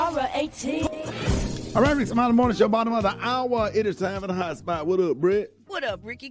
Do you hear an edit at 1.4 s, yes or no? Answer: yes